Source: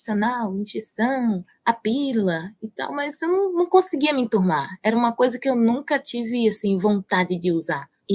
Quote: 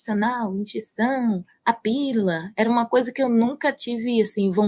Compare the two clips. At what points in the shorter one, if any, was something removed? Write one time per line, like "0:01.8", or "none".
0:02.5